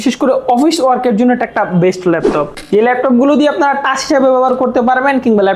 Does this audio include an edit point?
yes; 1 cut; at 2.6 s

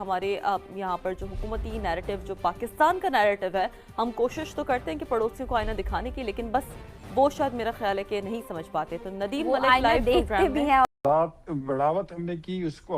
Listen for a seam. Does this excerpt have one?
yes; 1 cut; at 11.0 s

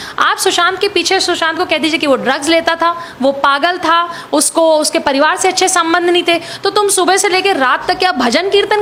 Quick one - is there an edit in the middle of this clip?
no; 0 cuts

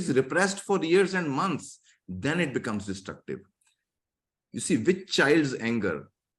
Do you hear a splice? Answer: no; 0 cuts

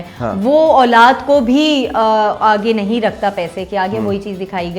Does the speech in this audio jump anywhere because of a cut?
no; 0 cuts

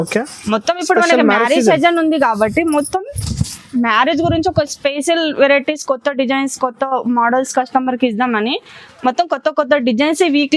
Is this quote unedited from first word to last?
yes; 0 cuts

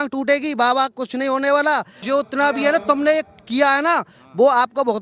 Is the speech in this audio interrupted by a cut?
no; 0 cuts

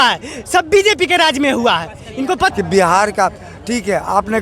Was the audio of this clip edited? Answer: yes; 1 cut; at 2.5 s

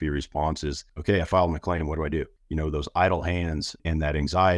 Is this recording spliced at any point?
yes; 3 cuts; at 0.9 s, 2.4 s, 3.8 s

